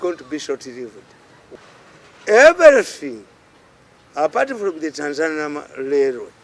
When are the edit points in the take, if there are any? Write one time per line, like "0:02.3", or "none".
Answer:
0:01.4